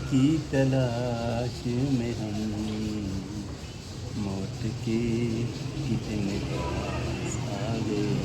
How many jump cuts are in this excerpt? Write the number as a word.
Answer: zero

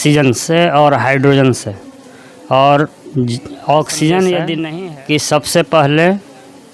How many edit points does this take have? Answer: one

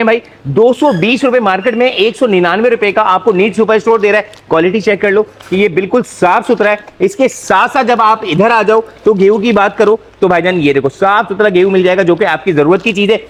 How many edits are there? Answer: zero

